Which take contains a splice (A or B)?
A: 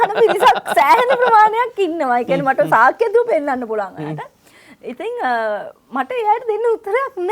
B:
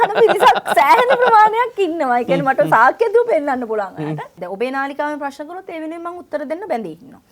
B